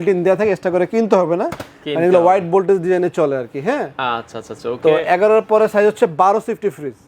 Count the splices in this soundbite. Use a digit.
0